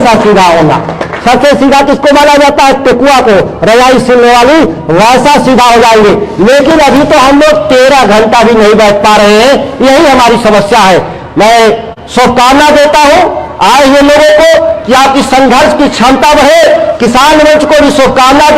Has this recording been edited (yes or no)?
no